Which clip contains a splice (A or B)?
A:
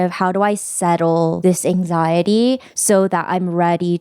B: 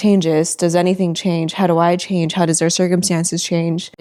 A